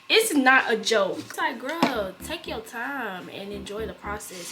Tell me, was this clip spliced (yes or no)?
yes